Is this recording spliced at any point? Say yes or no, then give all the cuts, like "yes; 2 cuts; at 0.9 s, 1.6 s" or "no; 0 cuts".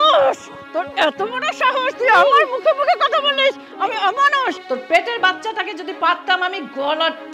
yes; 1 cut; at 4.6 s